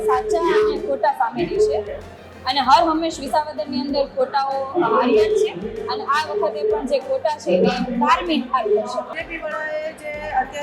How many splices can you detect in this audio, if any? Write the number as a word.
one